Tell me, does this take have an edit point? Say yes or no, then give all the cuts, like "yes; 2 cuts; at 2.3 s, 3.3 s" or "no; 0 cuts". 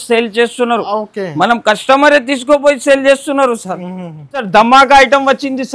yes; 1 cut; at 4.5 s